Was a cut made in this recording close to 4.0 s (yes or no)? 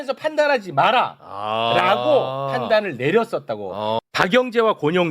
yes